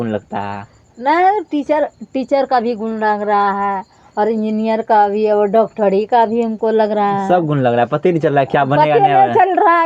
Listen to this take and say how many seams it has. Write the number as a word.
zero